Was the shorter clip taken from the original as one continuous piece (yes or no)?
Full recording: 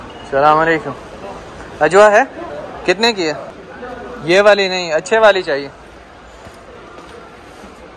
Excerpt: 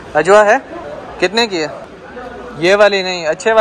yes